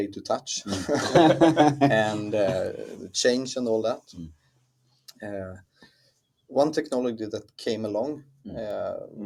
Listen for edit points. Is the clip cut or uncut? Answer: uncut